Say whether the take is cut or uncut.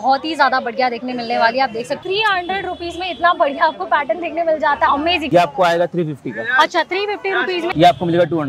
cut